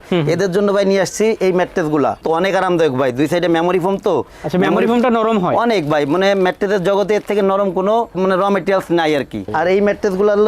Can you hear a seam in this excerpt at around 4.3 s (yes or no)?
no